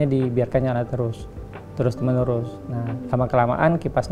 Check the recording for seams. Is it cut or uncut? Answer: uncut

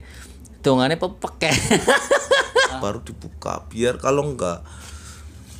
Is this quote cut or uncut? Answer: cut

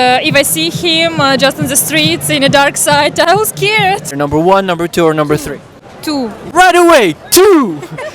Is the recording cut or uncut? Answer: cut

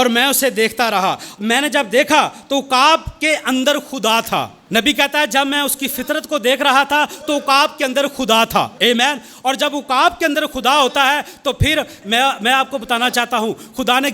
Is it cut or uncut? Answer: cut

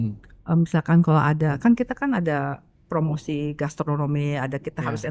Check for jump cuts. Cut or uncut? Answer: uncut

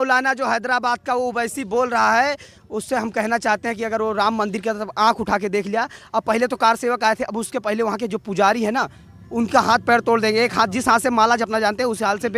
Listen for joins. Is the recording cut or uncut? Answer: uncut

